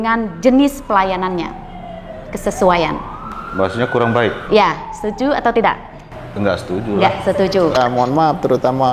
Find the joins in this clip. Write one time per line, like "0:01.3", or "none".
0:07.8